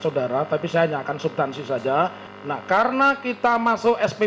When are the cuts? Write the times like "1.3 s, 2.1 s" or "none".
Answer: 2.3 s